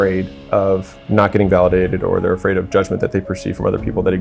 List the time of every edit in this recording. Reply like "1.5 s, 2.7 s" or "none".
1.0 s